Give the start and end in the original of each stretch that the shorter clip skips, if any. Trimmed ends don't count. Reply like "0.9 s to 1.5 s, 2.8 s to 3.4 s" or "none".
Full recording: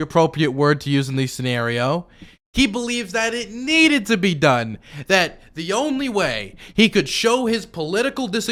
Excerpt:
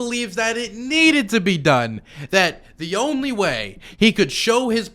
none